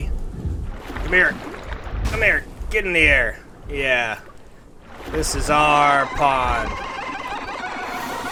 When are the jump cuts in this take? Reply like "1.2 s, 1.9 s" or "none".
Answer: none